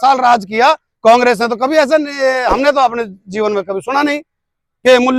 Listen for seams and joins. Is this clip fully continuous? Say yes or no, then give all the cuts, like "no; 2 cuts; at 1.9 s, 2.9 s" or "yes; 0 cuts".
yes; 0 cuts